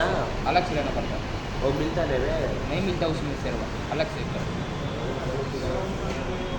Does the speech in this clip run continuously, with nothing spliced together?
yes; 0 cuts

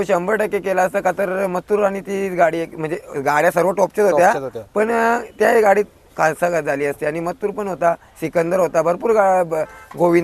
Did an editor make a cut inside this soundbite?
no; 0 cuts

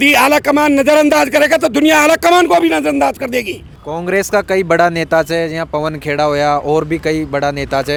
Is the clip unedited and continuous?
yes; 0 cuts

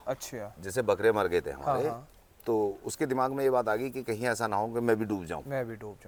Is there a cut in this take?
no; 0 cuts

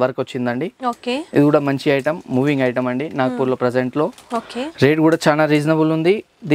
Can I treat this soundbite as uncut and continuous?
yes; 0 cuts

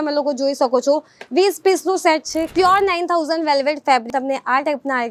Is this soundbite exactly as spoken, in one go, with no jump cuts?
no; 2 cuts; at 2.5 s, 4.1 s

